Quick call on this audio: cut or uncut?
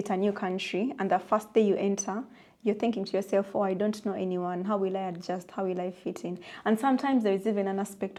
uncut